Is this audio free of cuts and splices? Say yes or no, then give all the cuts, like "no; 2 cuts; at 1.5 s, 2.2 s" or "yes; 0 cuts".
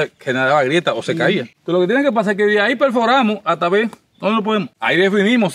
yes; 0 cuts